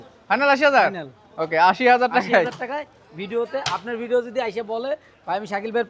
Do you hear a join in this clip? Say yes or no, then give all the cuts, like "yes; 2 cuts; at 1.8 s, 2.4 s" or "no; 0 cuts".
no; 0 cuts